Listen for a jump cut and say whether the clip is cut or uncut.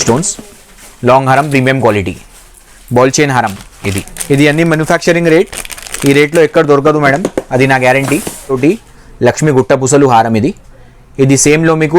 cut